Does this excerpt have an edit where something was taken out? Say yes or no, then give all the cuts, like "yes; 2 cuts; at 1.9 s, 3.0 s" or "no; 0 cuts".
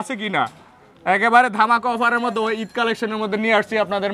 no; 0 cuts